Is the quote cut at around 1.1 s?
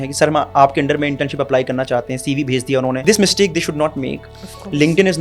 no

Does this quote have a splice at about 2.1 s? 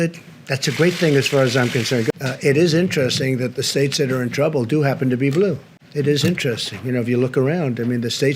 yes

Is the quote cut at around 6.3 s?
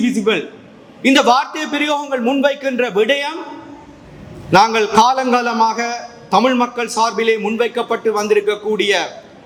no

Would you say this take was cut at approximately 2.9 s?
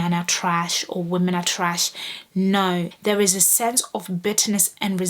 yes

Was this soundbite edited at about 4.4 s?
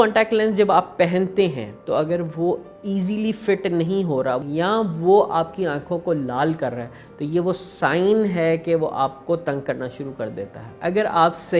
yes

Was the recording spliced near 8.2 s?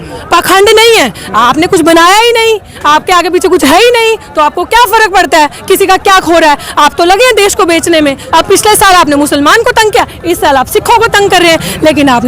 yes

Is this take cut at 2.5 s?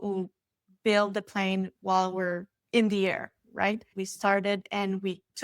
yes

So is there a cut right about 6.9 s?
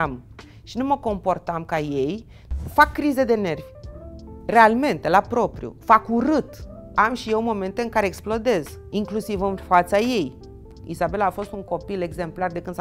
yes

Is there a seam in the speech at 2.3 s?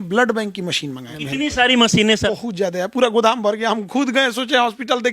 yes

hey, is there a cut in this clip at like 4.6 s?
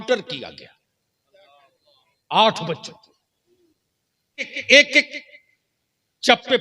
yes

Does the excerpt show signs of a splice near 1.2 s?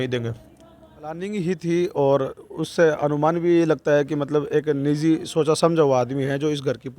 yes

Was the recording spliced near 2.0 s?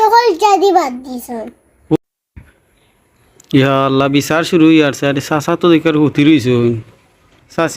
yes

